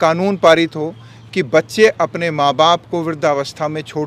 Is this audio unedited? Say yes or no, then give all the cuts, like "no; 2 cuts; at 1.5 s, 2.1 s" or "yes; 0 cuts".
yes; 0 cuts